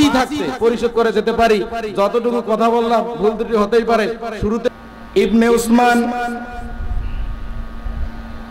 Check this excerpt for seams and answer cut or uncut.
cut